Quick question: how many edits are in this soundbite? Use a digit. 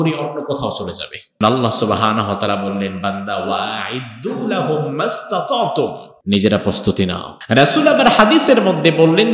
3